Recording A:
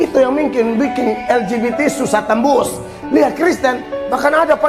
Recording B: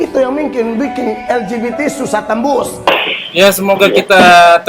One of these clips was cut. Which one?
B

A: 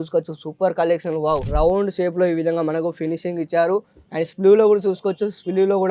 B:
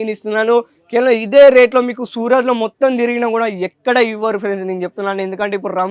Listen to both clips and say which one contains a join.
A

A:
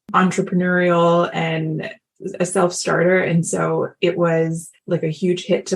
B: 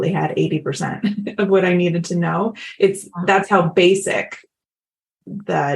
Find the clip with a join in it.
A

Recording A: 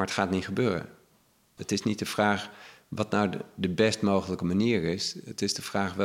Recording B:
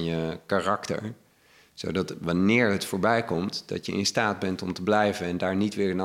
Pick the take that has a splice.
A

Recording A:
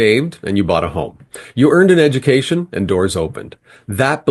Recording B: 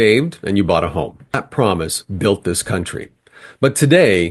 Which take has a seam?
B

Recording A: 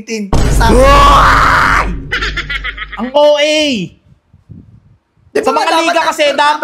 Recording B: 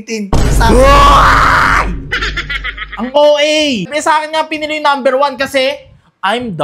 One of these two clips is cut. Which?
B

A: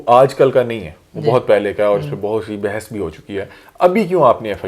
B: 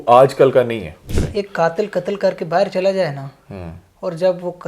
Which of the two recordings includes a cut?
B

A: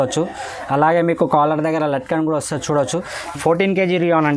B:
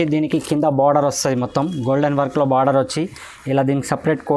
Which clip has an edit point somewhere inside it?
A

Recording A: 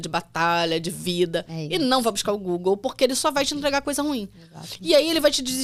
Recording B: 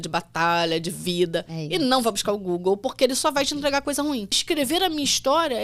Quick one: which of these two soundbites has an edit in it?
B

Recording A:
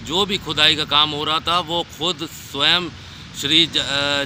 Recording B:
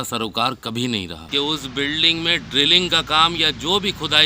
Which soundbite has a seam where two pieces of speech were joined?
B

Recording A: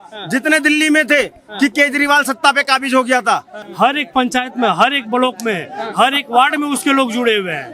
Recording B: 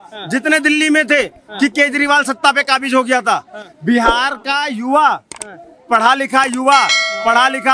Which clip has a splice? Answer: A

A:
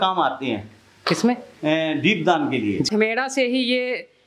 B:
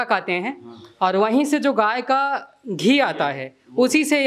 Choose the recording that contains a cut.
A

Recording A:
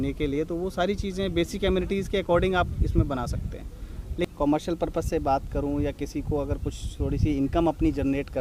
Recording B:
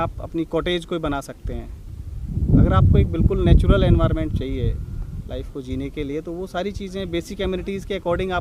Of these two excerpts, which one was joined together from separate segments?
A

